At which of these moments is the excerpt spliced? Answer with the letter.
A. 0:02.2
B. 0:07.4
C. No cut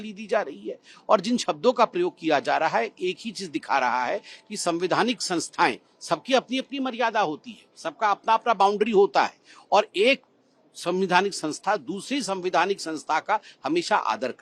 C